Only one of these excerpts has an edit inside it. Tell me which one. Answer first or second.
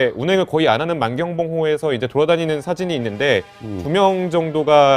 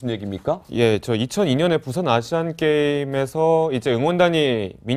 first